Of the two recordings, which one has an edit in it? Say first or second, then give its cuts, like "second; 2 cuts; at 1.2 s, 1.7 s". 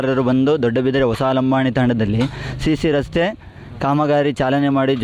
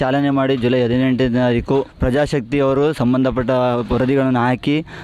second; 1 cut; at 1.9 s